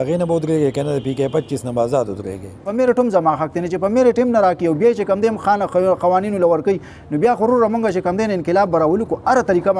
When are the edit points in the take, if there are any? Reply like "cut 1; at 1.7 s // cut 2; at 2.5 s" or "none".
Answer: cut 1; at 2.6 s